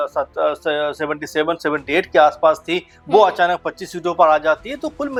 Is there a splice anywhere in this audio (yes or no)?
no